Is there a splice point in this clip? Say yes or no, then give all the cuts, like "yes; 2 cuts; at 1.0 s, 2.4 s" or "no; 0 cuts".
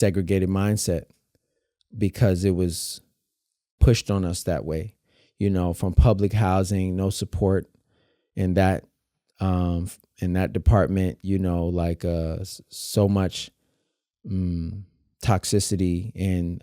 no; 0 cuts